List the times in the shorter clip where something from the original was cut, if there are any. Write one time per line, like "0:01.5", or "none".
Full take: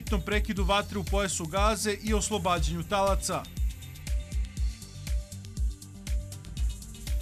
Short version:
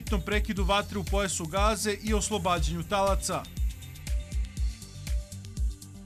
none

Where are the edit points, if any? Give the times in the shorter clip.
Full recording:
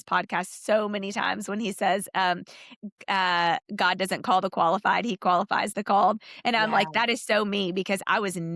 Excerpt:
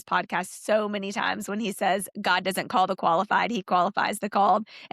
0:02.1

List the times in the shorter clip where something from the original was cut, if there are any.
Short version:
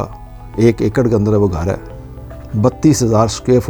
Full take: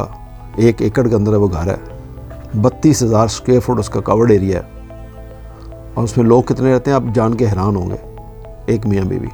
none

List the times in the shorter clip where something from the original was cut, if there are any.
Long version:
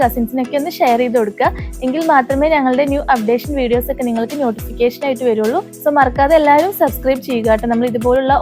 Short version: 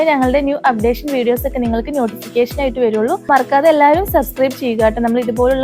0:03.3

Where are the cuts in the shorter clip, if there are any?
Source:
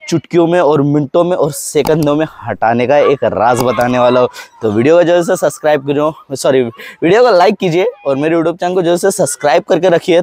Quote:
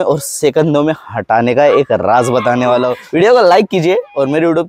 0:03.0

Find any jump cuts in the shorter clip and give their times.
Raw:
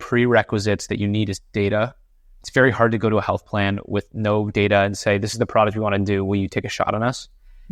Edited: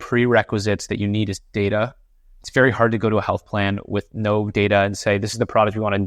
none

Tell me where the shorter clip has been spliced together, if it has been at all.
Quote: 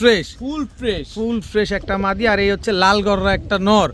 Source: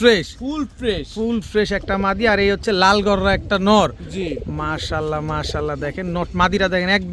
none

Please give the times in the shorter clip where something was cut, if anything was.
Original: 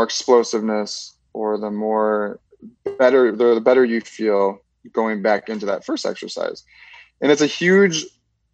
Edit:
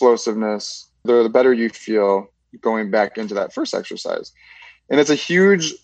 0:01.0

